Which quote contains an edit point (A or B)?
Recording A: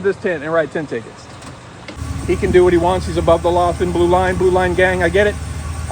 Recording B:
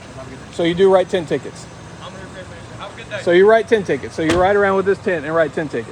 A